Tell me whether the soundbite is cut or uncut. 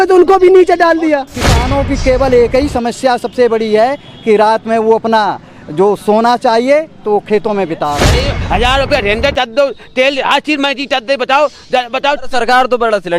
cut